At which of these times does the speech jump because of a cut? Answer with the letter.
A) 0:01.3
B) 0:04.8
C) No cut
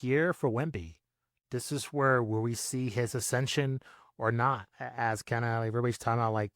A